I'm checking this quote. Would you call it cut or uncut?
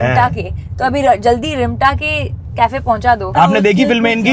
cut